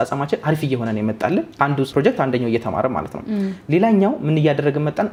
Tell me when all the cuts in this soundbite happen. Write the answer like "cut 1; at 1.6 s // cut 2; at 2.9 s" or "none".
none